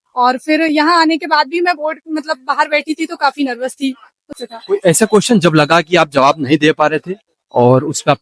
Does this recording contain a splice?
yes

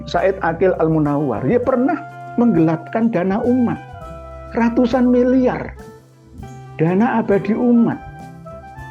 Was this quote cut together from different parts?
yes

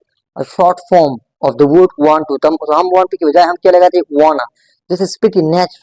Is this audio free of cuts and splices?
yes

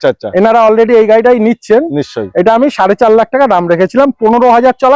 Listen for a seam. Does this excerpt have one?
no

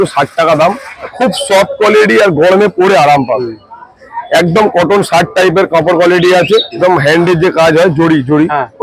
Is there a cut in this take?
yes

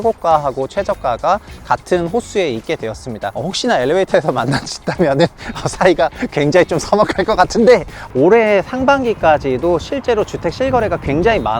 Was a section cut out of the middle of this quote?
yes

